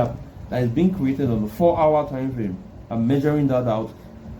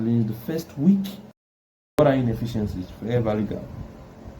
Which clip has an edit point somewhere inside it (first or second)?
second